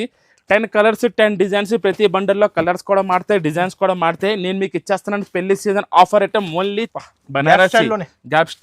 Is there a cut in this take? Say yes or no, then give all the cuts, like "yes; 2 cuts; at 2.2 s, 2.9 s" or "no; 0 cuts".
yes; 1 cut; at 6.9 s